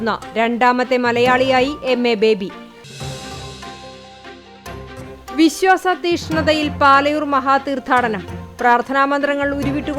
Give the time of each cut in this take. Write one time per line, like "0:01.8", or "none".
0:02.7
0:05.0